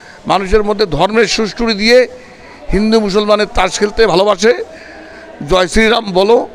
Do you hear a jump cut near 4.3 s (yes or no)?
no